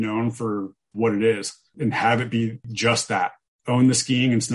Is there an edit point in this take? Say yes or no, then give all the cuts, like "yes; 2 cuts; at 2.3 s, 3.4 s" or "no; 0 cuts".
yes; 2 cuts; at 1.7 s, 3.0 s